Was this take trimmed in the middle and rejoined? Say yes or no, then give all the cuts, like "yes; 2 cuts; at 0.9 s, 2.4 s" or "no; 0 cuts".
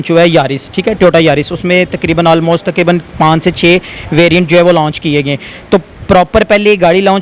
no; 0 cuts